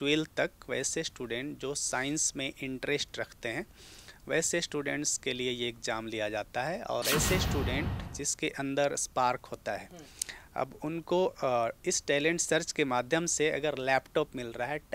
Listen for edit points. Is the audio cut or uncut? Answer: cut